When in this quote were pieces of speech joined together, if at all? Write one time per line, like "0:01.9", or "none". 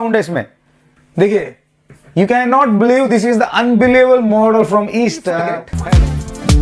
0:05.7